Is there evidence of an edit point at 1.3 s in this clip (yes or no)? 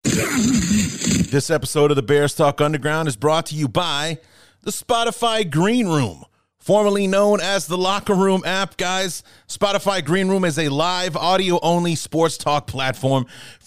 yes